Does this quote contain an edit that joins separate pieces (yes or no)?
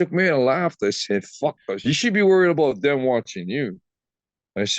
yes